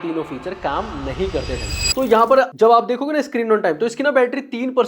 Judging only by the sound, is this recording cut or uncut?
cut